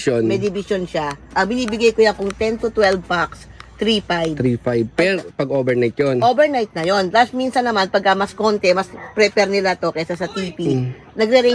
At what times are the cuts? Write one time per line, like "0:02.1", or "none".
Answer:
none